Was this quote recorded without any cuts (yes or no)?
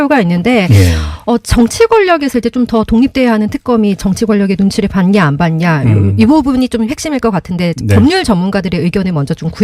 yes